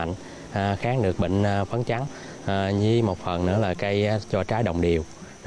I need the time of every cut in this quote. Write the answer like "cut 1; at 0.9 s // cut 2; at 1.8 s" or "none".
cut 1; at 2.1 s